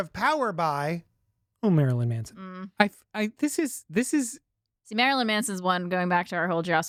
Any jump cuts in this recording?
no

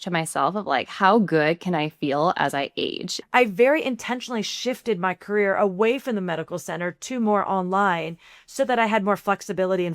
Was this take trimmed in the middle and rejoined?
yes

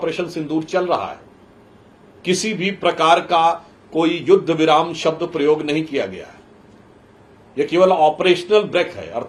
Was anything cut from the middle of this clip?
no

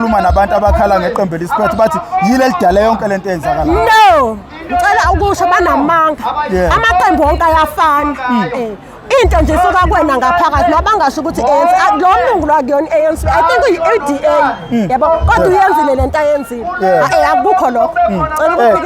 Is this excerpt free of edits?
yes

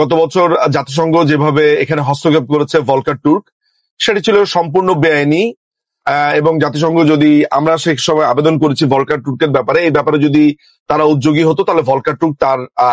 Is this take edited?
no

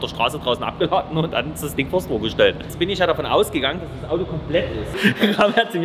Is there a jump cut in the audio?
yes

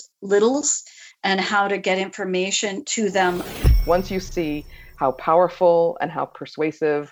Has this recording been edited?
yes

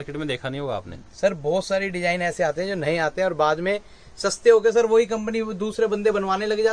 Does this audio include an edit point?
no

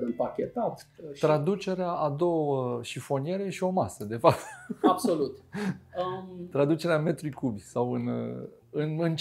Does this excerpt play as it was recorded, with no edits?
yes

